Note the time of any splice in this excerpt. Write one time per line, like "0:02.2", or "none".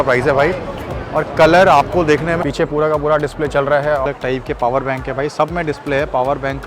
0:02.4
0:04.0